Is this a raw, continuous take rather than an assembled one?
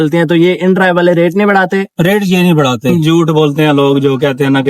no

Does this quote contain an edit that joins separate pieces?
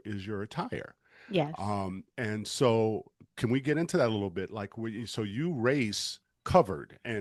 no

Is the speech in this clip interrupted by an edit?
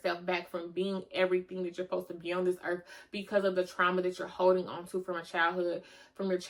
no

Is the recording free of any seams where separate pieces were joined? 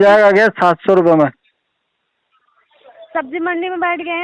yes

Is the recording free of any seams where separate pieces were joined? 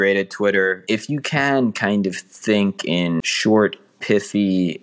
no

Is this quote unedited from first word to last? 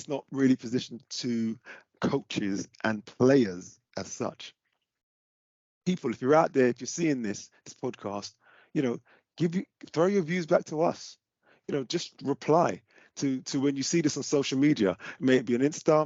yes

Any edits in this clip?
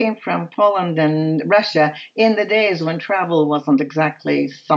no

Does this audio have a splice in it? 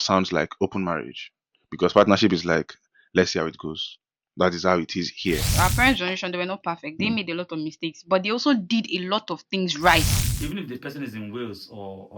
yes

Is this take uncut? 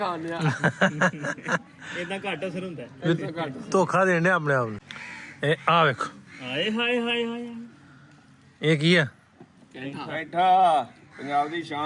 no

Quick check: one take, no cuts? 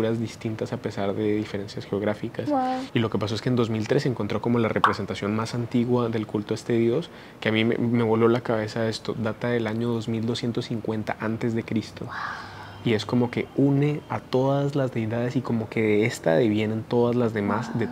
yes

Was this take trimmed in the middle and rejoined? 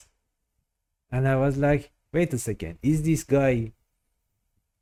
no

